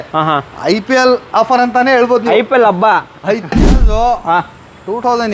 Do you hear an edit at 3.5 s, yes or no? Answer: yes